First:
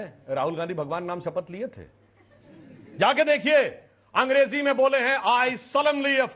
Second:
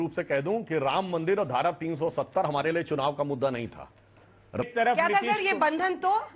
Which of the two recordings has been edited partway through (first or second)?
second